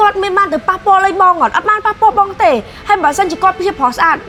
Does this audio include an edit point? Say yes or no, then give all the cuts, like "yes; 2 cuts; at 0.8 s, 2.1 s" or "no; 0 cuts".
no; 0 cuts